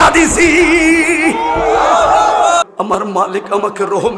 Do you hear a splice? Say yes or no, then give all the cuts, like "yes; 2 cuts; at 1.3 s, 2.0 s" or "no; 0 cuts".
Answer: yes; 1 cut; at 2.6 s